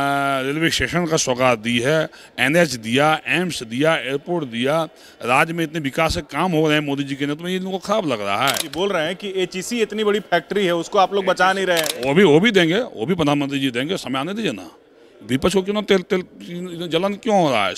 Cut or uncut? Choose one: cut